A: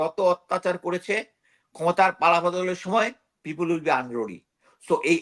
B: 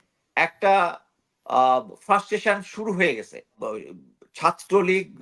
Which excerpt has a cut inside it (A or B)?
B